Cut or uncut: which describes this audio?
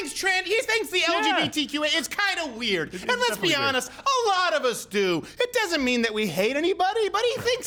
uncut